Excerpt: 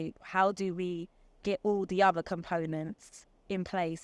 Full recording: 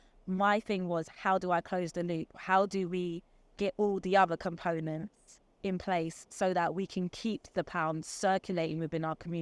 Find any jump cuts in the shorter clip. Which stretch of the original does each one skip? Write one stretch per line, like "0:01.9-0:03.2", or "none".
none